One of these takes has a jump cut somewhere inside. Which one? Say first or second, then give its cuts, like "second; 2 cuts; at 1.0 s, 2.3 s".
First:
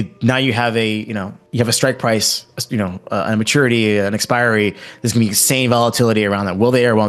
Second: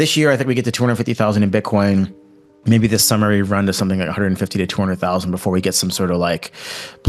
first; 1 cut; at 1.4 s